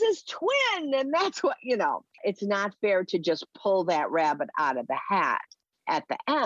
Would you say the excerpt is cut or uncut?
uncut